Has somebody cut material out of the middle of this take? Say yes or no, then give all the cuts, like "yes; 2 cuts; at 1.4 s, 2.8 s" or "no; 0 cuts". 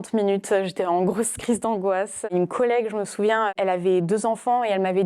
yes; 2 cuts; at 2.2 s, 3.5 s